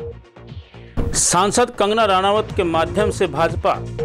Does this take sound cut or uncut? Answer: cut